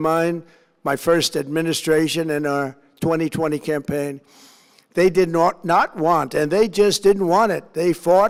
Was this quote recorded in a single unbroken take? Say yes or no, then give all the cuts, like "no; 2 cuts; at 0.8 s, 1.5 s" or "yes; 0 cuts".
yes; 0 cuts